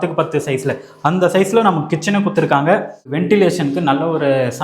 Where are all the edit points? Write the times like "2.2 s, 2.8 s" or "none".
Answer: 3.2 s